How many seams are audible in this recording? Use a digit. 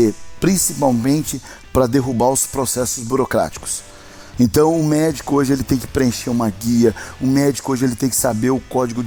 0